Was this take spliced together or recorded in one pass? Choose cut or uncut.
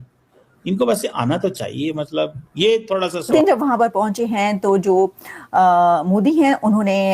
cut